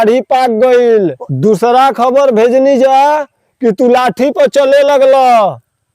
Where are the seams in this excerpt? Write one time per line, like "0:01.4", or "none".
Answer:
0:01.2